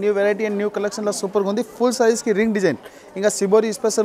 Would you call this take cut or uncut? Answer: uncut